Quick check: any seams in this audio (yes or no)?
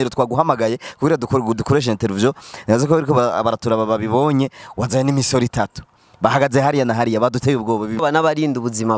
yes